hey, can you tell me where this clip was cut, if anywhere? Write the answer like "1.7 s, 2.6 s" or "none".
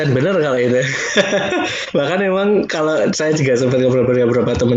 none